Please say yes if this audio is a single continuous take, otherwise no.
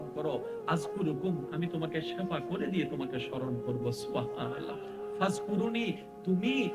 yes